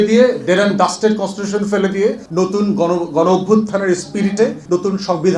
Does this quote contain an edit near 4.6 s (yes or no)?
yes